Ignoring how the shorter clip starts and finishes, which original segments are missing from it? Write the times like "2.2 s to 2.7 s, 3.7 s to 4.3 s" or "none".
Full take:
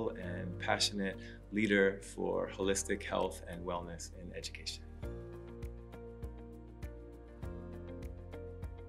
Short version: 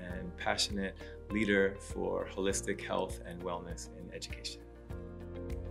4.5 s to 6.8 s

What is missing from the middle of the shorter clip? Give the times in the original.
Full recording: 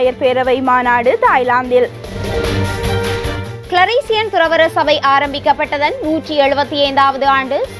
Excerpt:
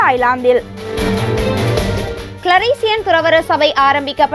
none

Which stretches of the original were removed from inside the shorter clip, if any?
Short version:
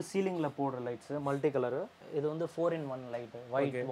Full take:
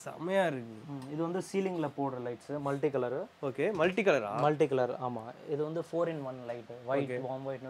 3.3 s to 5.3 s

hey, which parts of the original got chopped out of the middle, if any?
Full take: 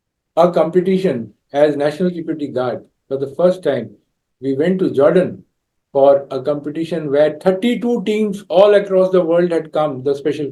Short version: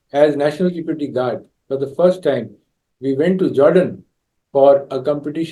none

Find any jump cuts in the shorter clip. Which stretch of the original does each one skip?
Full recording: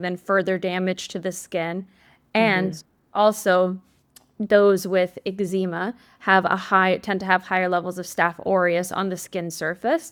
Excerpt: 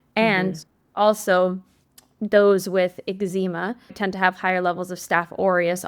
6.1 s to 7.0 s

